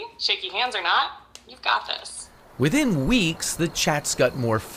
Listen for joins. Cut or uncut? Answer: uncut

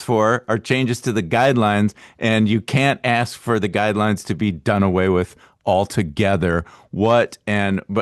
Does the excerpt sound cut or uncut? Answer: uncut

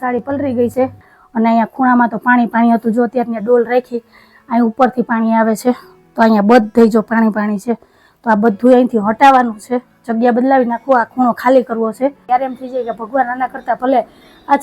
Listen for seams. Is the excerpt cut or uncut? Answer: cut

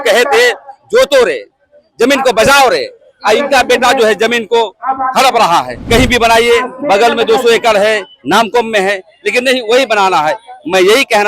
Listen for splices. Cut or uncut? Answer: cut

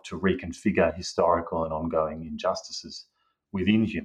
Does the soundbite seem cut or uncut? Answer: uncut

